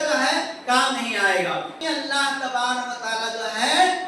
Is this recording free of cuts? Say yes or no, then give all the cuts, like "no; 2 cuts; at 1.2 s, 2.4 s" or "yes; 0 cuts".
no; 1 cut; at 1.8 s